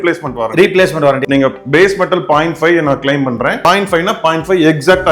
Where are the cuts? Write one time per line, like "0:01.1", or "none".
0:01.2